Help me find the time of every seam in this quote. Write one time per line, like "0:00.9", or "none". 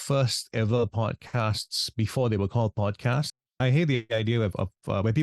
0:03.3